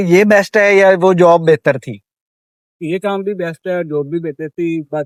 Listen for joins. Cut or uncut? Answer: uncut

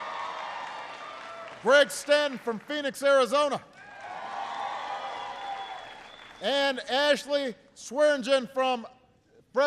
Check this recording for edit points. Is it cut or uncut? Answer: cut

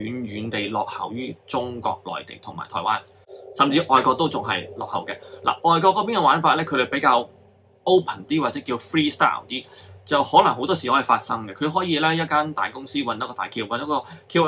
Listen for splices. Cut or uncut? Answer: uncut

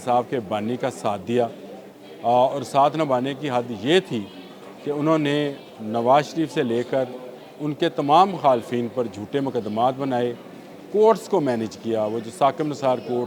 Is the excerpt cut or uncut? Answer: uncut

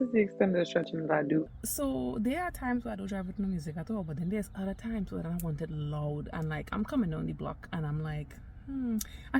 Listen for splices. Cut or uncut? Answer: cut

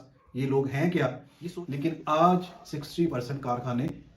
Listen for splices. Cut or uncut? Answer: cut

